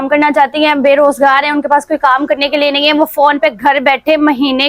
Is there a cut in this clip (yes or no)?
no